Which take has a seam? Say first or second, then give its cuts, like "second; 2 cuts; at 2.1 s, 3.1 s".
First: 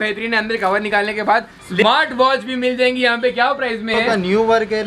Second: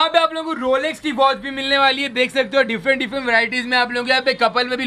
first; 2 cuts; at 1.7 s, 3.9 s